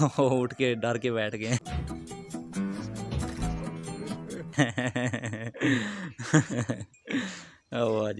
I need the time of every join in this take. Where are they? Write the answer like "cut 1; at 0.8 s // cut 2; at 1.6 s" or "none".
none